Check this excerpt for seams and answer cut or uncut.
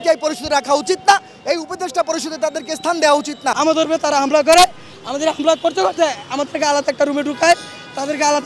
cut